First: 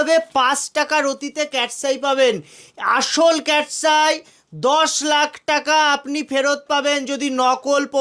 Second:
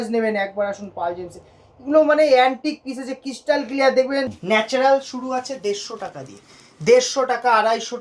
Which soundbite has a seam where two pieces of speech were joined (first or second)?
second